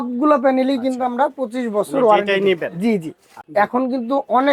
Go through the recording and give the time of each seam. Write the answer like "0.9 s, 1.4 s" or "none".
3.4 s